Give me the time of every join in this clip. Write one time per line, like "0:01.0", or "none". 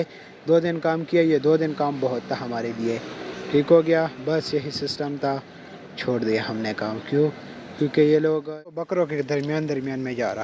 0:08.8